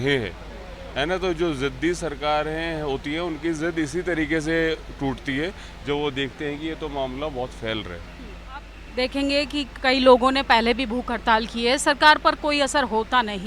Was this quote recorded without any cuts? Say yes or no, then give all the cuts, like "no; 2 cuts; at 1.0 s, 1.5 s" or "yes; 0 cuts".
no; 1 cut; at 8.7 s